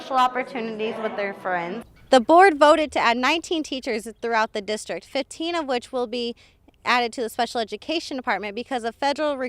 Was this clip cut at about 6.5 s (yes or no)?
no